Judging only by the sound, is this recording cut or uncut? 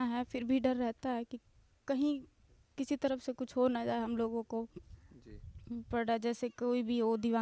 cut